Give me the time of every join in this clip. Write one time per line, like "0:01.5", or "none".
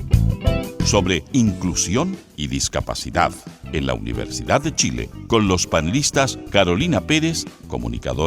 0:00.9